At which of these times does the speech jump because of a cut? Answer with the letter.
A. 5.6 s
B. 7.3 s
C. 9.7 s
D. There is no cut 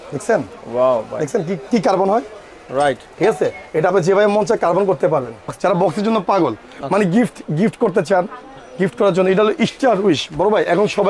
A